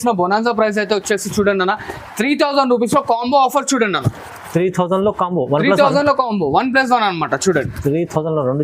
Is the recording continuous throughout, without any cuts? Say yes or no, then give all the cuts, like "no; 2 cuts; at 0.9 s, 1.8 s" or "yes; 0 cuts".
yes; 0 cuts